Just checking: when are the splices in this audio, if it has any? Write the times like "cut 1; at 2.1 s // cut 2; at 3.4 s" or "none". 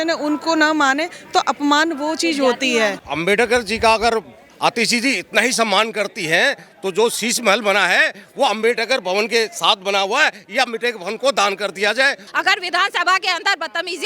cut 1; at 3.0 s // cut 2; at 12.2 s